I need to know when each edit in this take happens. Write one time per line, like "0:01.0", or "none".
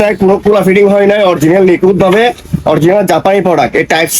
none